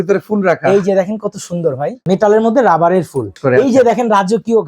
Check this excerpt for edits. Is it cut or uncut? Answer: cut